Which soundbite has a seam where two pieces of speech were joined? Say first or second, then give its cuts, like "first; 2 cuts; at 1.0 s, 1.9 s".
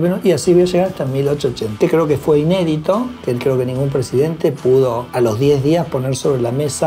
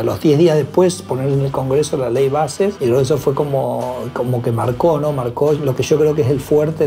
first; 2 cuts; at 1.7 s, 5.0 s